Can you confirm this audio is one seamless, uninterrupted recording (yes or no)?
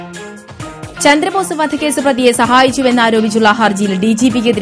no